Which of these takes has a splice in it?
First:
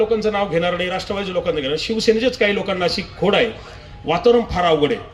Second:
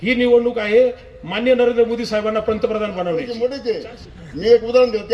second; 1 cut; at 3.3 s

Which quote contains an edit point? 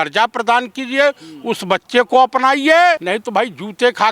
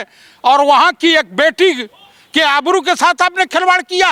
first; 1 cut; at 3.0 s

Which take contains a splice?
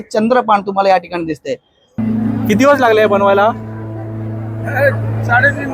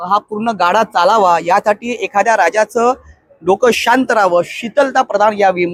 first; 1 cut; at 2.0 s

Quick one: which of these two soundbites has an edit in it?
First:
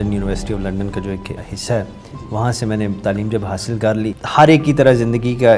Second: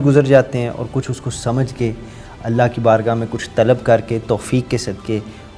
first; 2 cuts; at 1.4 s, 4.2 s

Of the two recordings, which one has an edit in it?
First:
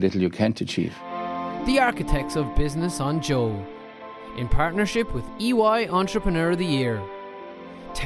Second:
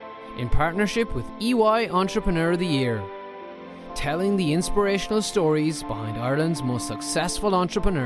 first; 1 cut; at 1.0 s

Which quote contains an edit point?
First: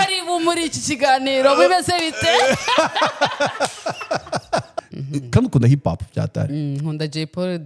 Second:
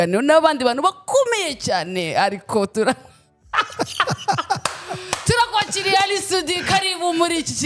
first; 1 cut; at 4.8 s

